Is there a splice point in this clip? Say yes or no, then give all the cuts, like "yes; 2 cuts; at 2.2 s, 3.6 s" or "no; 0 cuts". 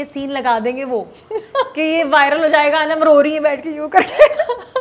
no; 0 cuts